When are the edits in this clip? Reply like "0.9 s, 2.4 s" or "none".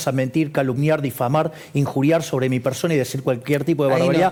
none